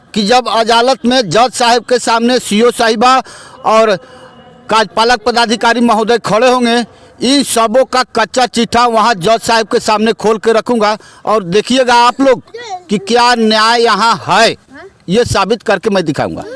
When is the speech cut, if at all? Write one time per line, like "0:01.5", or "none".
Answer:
none